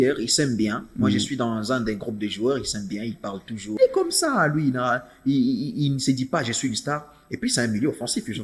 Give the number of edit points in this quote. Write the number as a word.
one